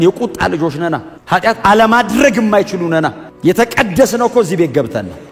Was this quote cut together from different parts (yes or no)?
no